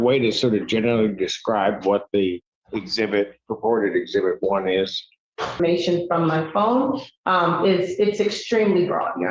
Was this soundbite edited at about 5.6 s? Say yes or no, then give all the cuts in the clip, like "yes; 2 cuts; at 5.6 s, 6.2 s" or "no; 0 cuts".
yes; 1 cut; at 5.6 s